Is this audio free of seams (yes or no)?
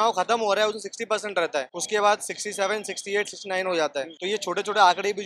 no